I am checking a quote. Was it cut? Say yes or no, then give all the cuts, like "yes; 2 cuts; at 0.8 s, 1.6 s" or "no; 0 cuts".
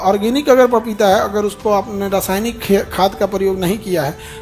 no; 0 cuts